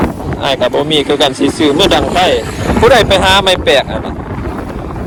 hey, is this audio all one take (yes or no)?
yes